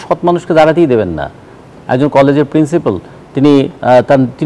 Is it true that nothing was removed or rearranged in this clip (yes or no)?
no